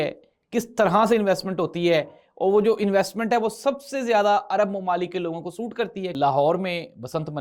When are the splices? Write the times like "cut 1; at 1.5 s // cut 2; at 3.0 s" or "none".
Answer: cut 1; at 6.1 s